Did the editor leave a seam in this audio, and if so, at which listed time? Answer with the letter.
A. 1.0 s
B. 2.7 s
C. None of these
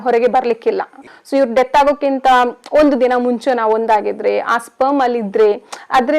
A